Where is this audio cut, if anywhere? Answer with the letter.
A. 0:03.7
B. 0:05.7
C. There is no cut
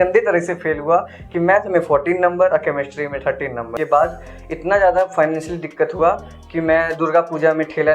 A